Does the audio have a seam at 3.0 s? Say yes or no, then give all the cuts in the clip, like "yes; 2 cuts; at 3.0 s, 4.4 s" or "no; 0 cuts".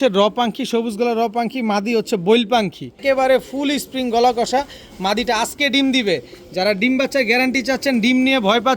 yes; 1 cut; at 3.0 s